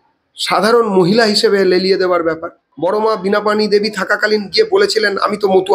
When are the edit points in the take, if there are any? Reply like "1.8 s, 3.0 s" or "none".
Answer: 2.6 s